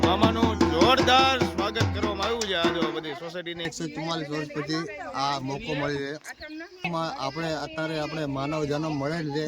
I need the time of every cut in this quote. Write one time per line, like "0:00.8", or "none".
0:03.7
0:06.8